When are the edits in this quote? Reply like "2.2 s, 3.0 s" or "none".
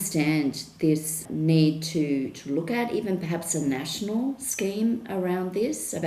1.2 s